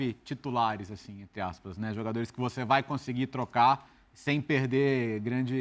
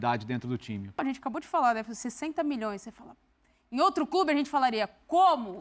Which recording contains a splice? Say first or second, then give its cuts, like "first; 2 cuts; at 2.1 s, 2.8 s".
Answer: second; 1 cut; at 1.0 s